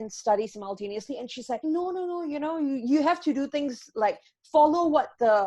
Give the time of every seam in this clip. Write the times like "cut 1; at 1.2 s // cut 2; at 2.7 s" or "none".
cut 1; at 1.6 s

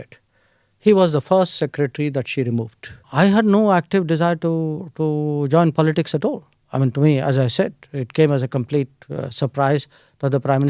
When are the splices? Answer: cut 1; at 3.0 s

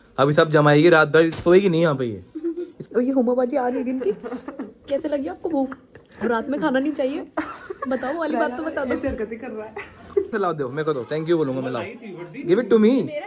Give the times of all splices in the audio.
cut 1; at 2.7 s // cut 2; at 10.3 s

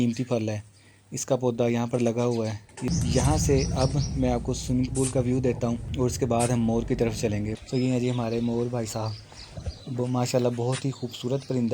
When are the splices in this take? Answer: cut 1; at 2.8 s // cut 2; at 5.9 s // cut 3; at 7.5 s

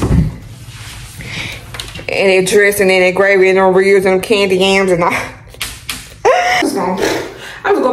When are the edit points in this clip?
cut 1; at 6.6 s

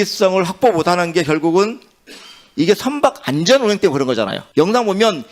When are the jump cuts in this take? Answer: cut 1; at 4.4 s

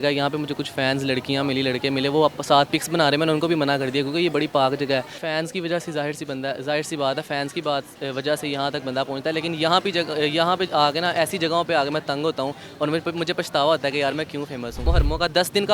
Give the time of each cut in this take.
cut 1; at 5.2 s // cut 2; at 14.8 s

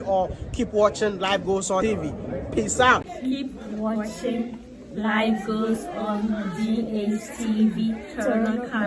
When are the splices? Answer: cut 1; at 1.8 s // cut 2; at 3.1 s

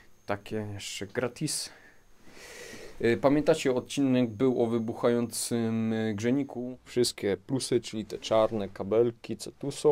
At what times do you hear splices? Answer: cut 1; at 6.5 s

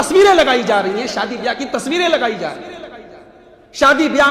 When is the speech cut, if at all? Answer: none

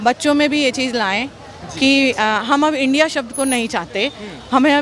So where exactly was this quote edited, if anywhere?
none

